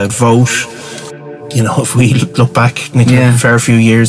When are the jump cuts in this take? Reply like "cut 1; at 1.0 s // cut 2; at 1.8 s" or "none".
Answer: cut 1; at 1.0 s